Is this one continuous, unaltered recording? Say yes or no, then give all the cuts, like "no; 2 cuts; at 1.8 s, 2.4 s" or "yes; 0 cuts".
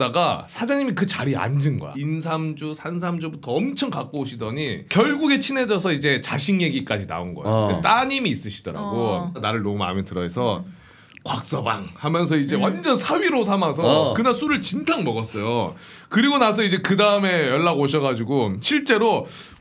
yes; 0 cuts